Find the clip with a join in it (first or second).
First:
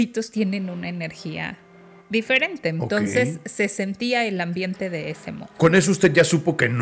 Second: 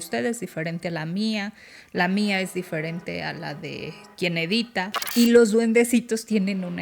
second